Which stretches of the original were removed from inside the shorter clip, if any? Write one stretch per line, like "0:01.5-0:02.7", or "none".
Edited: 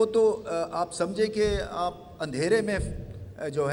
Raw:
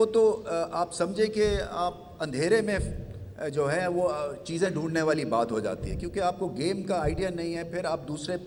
none